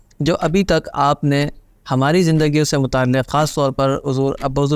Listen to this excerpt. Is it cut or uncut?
uncut